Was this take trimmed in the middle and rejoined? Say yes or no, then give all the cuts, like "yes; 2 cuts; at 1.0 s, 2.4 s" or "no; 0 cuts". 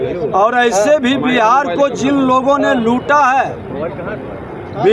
no; 0 cuts